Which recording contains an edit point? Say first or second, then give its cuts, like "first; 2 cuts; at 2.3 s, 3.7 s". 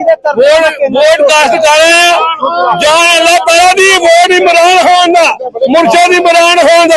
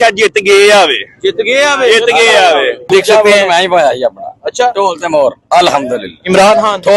second; 1 cut; at 2.9 s